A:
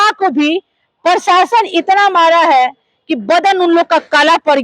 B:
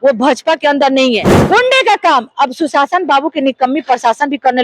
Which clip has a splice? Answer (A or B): B